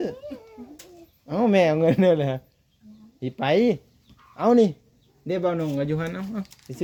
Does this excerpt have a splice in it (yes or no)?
no